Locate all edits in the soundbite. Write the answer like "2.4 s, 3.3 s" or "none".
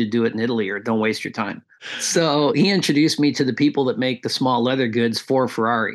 1.9 s